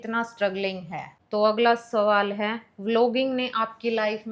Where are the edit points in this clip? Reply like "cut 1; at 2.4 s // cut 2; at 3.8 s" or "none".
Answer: cut 1; at 1.1 s